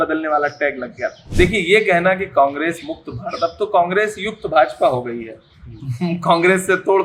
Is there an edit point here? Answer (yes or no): yes